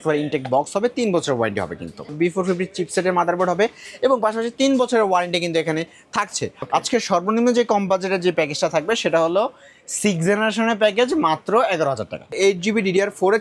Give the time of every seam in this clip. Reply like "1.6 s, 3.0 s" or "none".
2.1 s, 6.6 s, 12.3 s

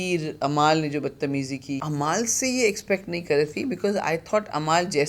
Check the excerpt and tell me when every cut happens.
1.8 s

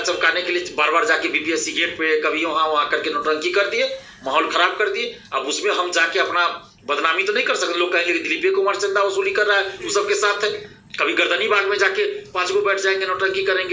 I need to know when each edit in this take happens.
10.7 s

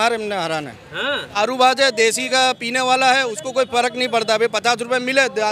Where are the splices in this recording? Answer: 1.4 s

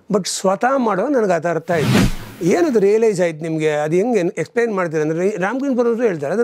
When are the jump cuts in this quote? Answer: 2.2 s

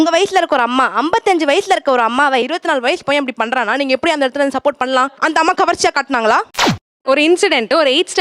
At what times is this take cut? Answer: 6.5 s

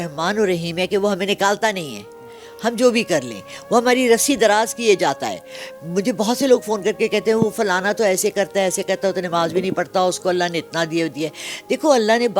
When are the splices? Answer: none

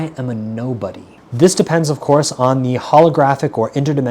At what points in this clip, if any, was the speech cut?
1.2 s

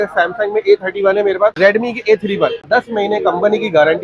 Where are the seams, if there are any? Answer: 1.5 s, 2.6 s

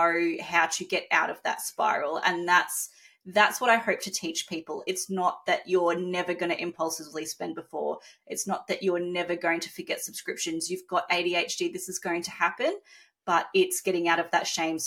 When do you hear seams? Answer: none

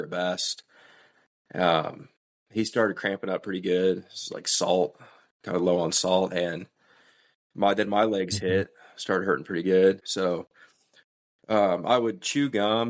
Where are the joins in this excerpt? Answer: 10.1 s

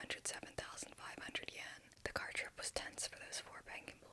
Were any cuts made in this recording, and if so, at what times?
1.9 s

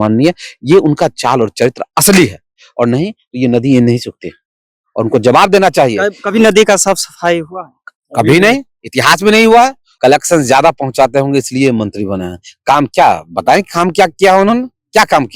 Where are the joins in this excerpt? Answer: 9.9 s

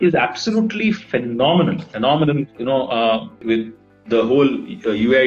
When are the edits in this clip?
none

